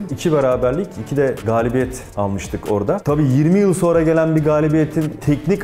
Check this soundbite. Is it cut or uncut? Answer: uncut